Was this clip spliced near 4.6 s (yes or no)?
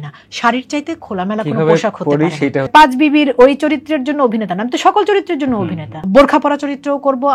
no